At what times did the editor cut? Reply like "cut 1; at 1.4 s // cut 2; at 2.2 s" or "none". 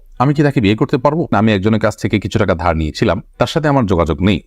cut 1; at 1.3 s

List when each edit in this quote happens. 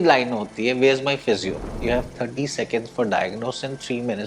cut 1; at 1.8 s

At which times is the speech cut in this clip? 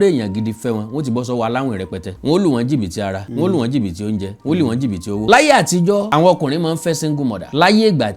cut 1; at 2.1 s // cut 2; at 5.2 s

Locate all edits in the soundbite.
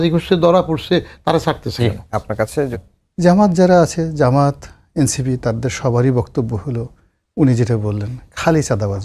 cut 1; at 2.7 s

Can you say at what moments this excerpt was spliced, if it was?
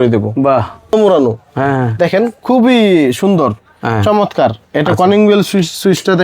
cut 1; at 0.9 s

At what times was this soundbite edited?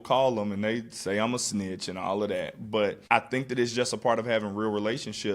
cut 1; at 3.0 s

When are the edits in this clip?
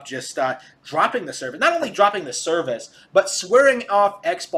none

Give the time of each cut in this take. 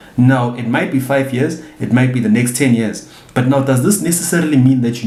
none

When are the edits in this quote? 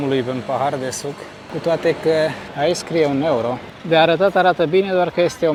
none

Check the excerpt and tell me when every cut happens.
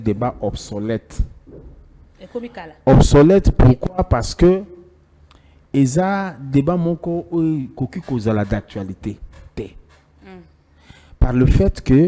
none

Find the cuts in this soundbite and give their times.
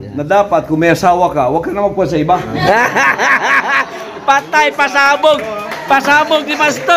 none

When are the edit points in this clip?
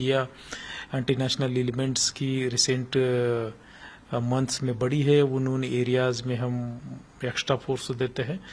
none

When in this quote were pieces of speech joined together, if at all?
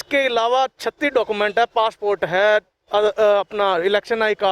none

